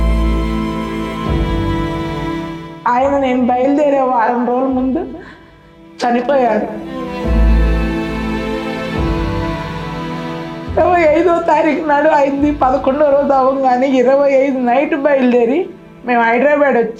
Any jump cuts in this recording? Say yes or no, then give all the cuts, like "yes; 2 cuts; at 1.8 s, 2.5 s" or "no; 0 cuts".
no; 0 cuts